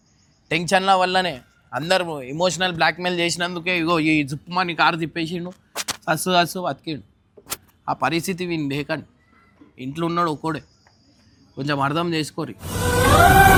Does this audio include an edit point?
no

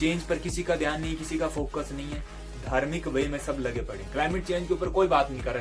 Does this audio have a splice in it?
no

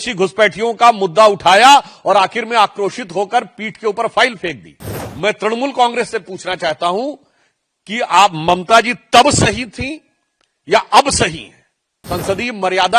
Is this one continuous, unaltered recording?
no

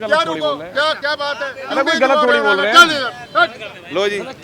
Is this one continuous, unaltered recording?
yes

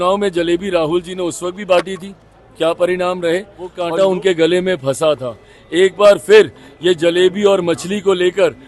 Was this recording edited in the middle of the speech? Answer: yes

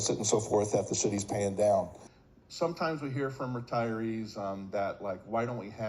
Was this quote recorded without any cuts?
no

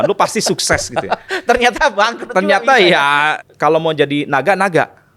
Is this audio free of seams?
no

